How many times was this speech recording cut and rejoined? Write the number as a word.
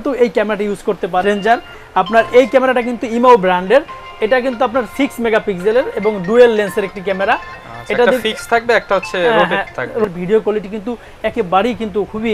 two